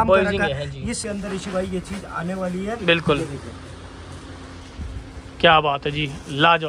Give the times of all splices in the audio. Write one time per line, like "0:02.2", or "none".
0:01.0